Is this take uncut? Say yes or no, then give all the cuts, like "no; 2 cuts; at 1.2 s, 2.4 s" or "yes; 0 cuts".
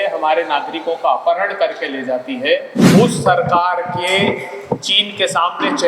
no; 1 cut; at 2.8 s